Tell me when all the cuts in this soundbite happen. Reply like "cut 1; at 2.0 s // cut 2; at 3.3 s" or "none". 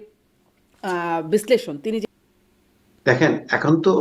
cut 1; at 2.0 s